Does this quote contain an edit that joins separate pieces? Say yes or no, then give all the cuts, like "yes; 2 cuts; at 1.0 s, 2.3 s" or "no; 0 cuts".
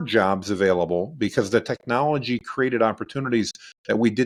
no; 0 cuts